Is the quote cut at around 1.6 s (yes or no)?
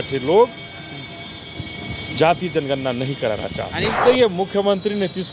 no